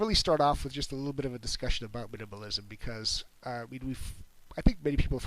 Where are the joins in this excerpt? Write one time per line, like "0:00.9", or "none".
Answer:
0:03.2